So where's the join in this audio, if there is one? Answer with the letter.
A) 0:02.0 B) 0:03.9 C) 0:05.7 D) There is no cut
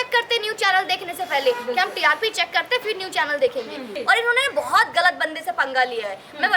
B